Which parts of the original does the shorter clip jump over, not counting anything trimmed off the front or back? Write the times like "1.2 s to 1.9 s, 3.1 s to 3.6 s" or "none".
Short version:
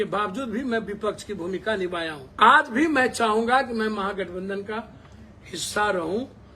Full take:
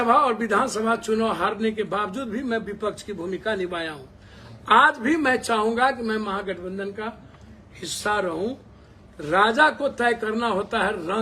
4.0 s to 4.5 s